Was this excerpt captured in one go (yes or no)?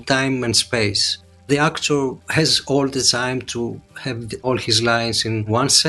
yes